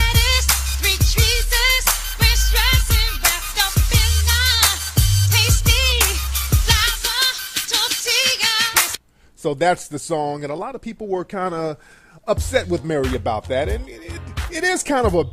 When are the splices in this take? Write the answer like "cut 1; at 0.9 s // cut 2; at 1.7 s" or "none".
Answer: cut 1; at 12.5 s